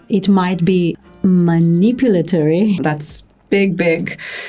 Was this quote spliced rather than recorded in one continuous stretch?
yes; 2 cuts; at 0.9 s, 2.8 s

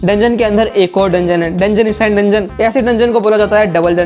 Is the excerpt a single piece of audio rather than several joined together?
yes; 0 cuts

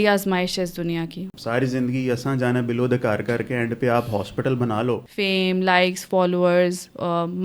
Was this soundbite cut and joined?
yes; 2 cuts; at 1.2 s, 5.1 s

